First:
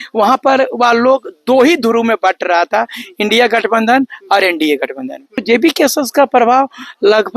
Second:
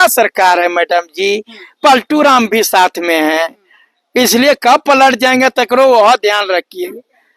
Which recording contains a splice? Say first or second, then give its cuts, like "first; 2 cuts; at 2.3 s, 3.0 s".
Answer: first; 1 cut; at 5.4 s